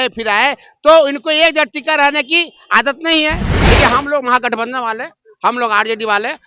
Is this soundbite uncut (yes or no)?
no